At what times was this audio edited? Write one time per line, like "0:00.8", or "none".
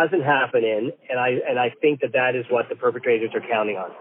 none